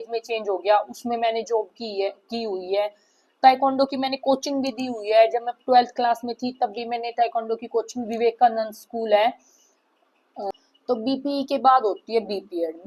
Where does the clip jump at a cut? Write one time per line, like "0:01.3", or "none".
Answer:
0:10.6